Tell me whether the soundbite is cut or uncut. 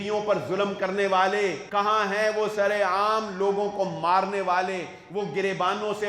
cut